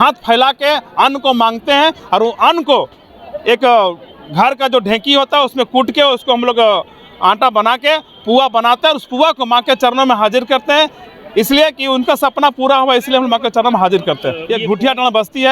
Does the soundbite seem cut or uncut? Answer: uncut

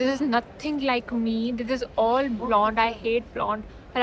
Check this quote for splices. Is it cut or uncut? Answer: uncut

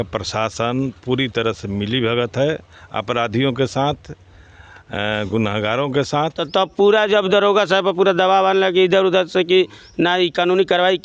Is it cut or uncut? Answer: cut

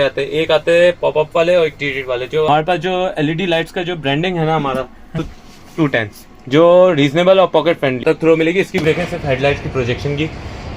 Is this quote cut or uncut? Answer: cut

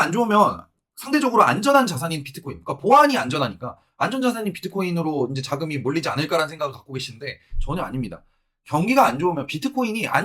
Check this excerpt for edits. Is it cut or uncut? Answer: uncut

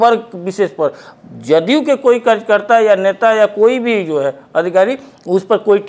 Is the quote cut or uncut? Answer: uncut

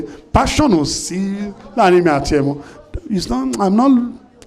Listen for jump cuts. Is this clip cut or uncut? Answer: uncut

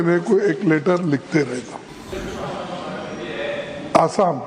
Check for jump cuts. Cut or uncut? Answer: cut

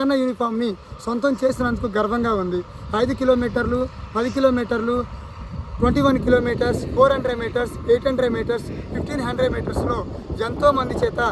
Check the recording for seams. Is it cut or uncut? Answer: uncut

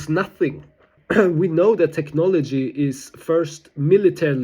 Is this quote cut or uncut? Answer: cut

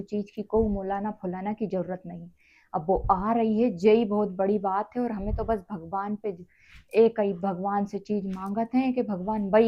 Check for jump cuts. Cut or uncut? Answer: uncut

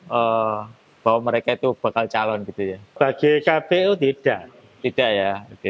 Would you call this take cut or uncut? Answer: cut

